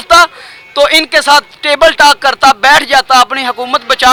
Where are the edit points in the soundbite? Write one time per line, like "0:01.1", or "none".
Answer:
none